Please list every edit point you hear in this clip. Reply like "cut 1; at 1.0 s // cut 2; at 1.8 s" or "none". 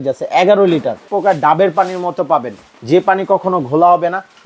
cut 1; at 1.1 s